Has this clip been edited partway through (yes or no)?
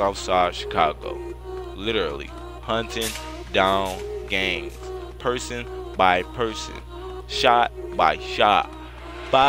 no